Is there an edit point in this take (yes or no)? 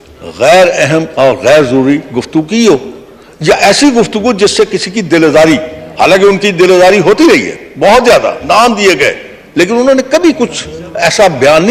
no